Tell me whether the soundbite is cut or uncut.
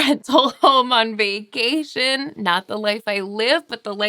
uncut